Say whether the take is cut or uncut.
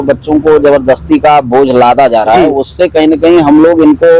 uncut